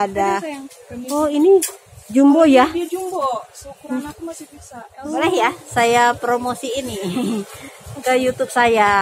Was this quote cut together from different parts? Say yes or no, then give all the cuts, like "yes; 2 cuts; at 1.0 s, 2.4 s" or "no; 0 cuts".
yes; 1 cut; at 5.0 s